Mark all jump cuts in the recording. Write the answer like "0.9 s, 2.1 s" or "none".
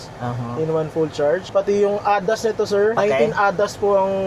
1.5 s